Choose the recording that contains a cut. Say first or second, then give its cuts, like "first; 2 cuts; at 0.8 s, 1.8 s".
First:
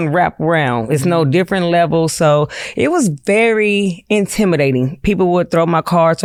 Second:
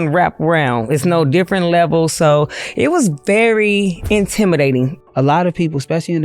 second; 1 cut; at 5.0 s